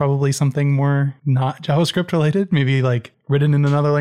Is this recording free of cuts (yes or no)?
no